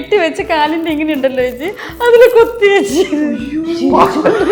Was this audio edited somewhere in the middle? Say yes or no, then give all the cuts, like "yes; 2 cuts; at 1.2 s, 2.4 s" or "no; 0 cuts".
no; 0 cuts